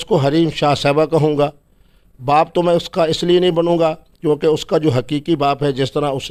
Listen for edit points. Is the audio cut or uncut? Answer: uncut